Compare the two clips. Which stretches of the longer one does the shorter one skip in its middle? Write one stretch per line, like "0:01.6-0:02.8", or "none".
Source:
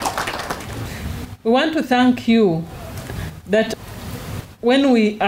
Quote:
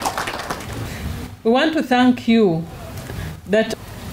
none